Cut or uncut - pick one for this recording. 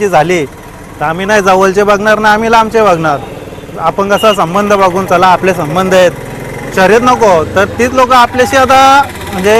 uncut